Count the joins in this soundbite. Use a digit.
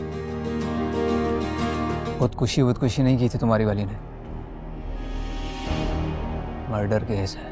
1